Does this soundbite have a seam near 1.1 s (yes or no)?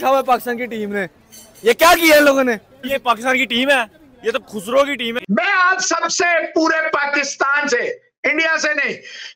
no